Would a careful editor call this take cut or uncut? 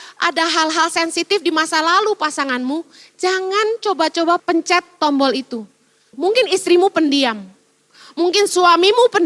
cut